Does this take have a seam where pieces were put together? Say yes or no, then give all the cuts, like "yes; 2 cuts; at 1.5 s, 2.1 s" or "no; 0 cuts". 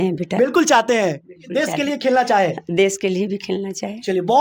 no; 0 cuts